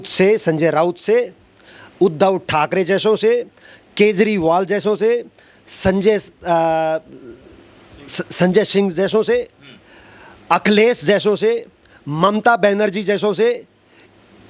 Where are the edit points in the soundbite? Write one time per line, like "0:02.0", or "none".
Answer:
none